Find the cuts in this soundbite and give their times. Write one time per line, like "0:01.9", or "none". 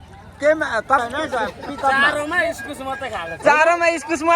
0:01.0